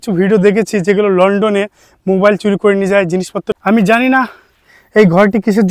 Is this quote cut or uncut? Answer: cut